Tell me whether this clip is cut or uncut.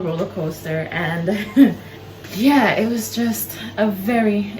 uncut